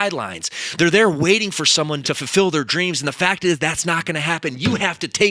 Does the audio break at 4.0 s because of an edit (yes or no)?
no